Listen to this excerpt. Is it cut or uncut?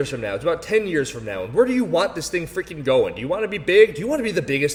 uncut